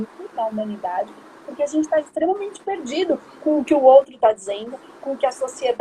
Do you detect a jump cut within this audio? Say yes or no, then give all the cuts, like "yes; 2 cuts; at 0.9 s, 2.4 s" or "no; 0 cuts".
no; 0 cuts